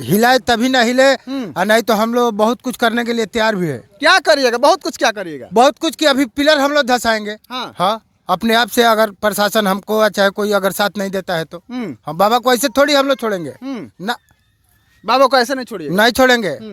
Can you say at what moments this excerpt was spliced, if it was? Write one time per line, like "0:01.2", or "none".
none